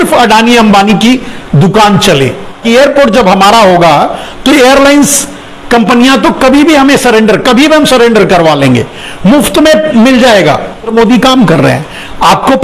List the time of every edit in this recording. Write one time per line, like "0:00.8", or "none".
0:02.6
0:10.9